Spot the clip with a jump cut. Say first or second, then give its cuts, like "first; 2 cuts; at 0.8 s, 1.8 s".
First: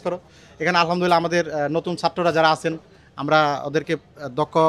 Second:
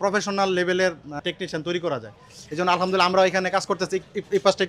second; 1 cut; at 1.2 s